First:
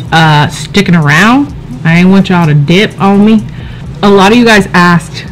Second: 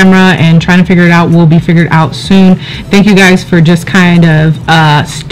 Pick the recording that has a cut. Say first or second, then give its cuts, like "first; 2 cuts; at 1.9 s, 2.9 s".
first; 1 cut; at 3.8 s